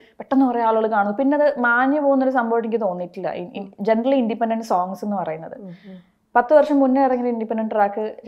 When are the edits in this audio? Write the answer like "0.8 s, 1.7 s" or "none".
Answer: none

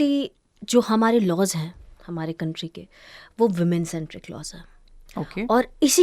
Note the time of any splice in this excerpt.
none

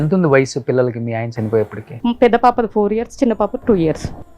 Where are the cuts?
1.8 s

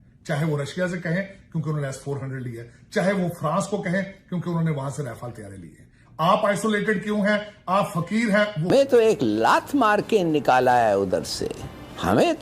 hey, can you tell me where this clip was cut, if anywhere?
8.7 s

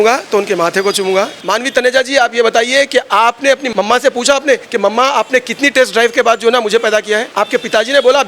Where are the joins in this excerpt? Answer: 1.4 s, 3.6 s, 4.7 s, 7.3 s

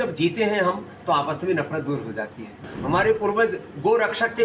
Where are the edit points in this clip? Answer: 2.6 s

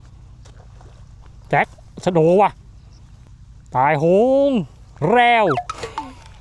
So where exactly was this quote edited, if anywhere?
none

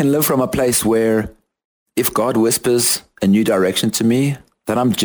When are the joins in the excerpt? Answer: none

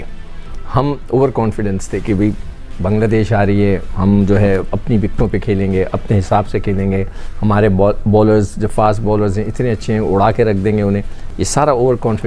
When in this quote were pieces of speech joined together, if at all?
none

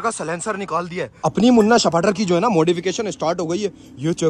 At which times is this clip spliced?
1.2 s

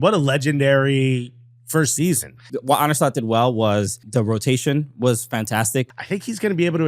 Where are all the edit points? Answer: 2.5 s, 4.0 s, 5.9 s

